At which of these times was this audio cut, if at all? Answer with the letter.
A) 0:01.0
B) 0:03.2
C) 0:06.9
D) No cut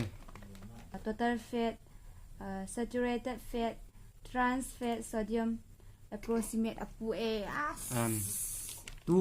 A